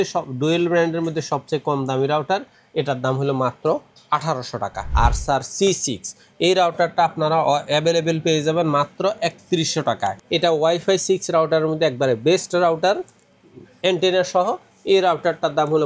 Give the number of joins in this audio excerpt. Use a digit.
2